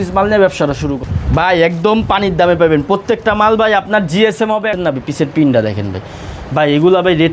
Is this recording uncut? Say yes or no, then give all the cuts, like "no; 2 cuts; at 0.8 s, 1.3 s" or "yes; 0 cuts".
no; 2 cuts; at 1.0 s, 4.7 s